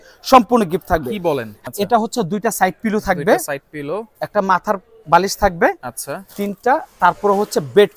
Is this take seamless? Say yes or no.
no